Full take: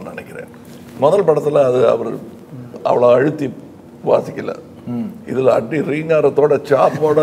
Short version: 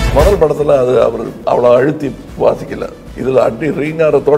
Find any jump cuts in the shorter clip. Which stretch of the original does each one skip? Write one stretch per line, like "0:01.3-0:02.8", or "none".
0:02.2-0:02.7
0:03.6-0:03.9
0:04.7-0:05.2

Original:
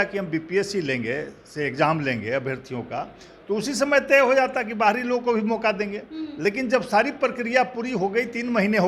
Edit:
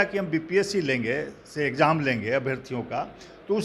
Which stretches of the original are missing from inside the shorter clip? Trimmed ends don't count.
none

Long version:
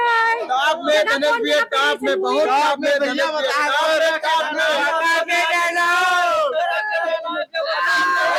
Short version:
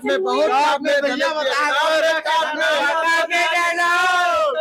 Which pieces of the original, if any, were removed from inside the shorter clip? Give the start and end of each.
none

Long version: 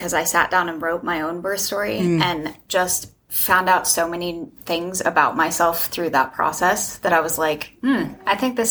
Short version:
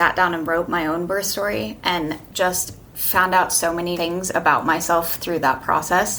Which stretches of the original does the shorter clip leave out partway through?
0:04.3-0:04.7

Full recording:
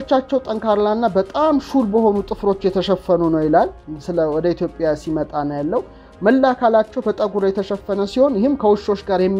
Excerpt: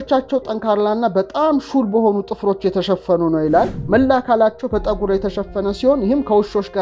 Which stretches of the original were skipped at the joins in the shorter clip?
0:03.8-0:06.1

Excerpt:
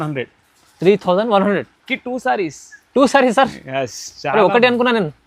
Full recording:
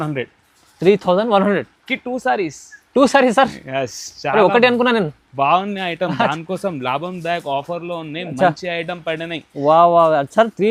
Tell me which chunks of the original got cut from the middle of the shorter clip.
none

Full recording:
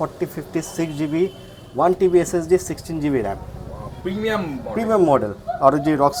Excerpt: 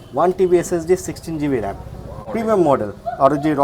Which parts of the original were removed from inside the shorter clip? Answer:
0:03.8-0:04.6

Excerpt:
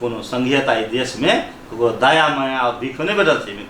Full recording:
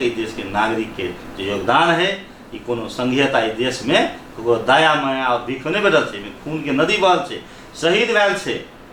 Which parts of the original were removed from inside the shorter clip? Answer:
none

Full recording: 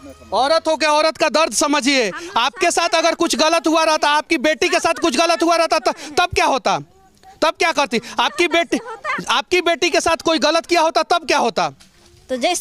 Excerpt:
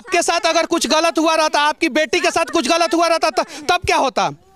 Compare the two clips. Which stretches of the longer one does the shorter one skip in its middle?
none

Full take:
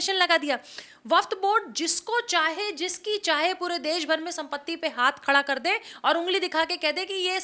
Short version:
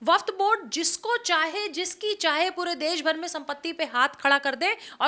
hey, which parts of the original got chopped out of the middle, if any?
none

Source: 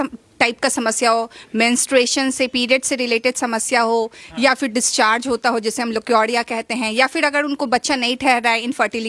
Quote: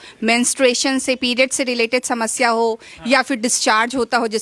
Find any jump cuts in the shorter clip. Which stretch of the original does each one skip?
none

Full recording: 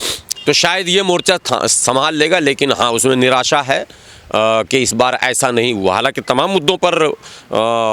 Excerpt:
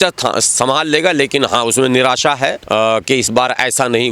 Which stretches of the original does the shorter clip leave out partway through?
0:03.9-0:04.2

